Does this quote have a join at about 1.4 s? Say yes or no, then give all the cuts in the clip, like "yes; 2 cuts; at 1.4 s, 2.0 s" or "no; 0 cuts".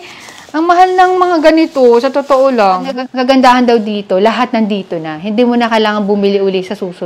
no; 1 cut; at 3.0 s